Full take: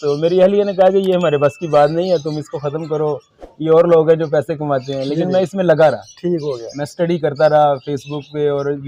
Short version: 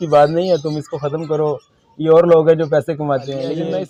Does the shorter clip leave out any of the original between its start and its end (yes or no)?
no